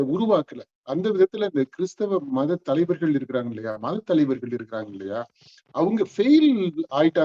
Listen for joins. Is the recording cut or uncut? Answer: uncut